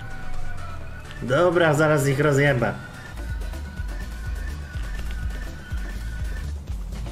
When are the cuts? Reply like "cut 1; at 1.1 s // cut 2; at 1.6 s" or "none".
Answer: cut 1; at 3.1 s

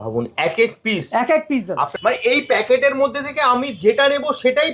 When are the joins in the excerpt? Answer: cut 1; at 1.9 s

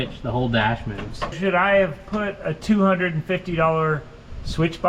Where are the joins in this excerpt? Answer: cut 1; at 1.3 s // cut 2; at 2.5 s

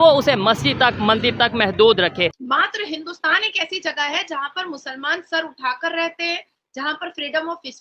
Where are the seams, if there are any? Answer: cut 1; at 2.4 s

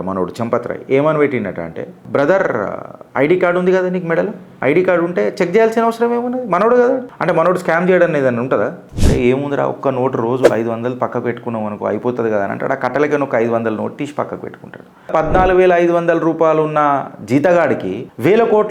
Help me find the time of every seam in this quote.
cut 1; at 8.8 s // cut 2; at 15.1 s

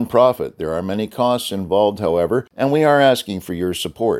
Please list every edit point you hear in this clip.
cut 1; at 2.5 s

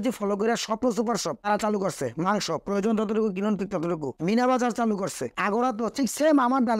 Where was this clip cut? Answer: none

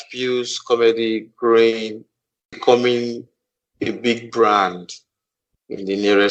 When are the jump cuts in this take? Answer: none

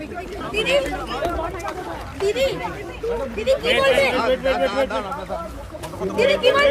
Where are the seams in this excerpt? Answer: none

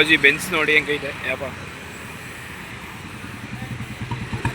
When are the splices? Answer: none

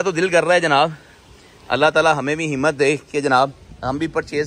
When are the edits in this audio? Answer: none

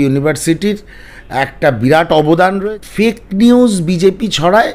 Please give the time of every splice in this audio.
cut 1; at 2.6 s

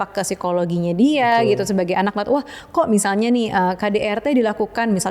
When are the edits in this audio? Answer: none

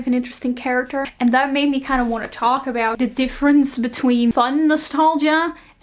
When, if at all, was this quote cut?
cut 1; at 1.1 s // cut 2; at 2.9 s // cut 3; at 4.3 s

